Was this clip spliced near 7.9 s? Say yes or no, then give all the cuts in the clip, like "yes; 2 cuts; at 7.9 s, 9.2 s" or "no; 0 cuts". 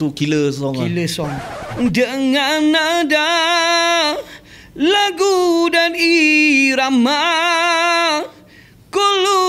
no; 1 cut; at 1.6 s